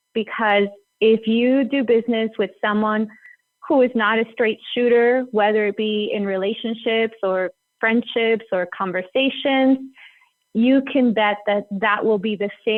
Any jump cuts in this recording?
no; 0 cuts

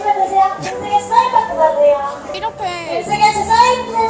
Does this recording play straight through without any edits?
yes; 0 cuts

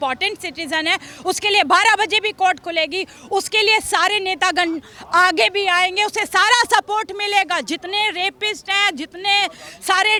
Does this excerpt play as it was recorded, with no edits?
yes; 0 cuts

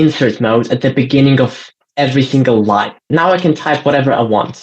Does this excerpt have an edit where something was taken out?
yes; 1 cut; at 3.1 s

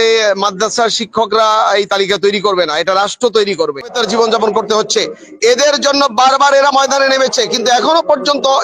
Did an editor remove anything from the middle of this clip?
yes; 1 cut; at 4.0 s

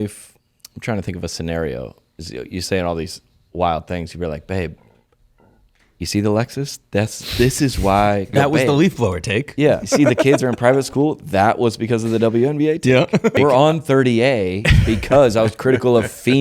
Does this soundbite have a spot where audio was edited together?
yes; 3 cuts; at 8.3 s, 10.0 s, 13.3 s

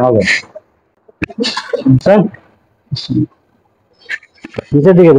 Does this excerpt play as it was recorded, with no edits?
yes; 0 cuts

